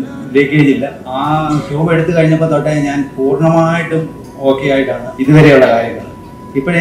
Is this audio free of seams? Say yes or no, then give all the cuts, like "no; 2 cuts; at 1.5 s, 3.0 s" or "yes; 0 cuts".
no; 2 cuts; at 1.0 s, 5.1 s